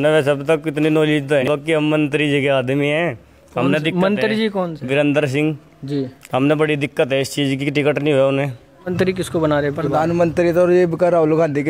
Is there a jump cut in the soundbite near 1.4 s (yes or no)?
yes